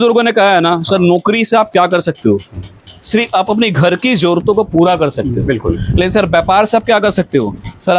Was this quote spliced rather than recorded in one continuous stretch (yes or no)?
no